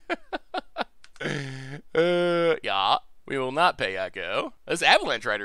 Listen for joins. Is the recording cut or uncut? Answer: cut